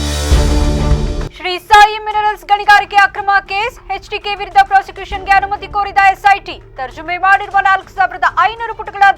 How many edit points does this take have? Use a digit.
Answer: 1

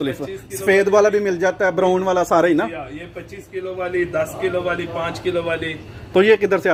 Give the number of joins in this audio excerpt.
0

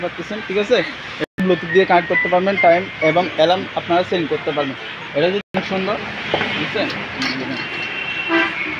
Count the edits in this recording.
2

